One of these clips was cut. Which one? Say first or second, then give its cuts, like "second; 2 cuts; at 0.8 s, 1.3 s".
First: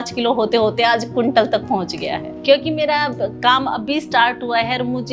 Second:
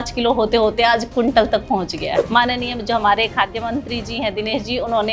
second; 1 cut; at 2.2 s